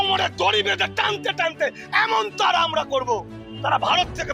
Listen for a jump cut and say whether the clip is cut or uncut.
uncut